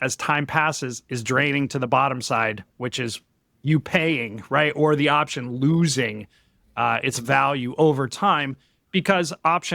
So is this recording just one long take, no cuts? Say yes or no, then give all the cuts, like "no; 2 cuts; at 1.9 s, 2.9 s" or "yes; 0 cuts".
yes; 0 cuts